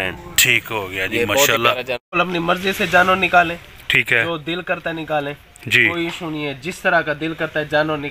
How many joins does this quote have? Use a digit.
1